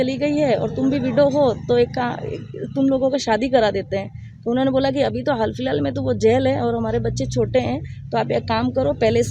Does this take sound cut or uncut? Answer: uncut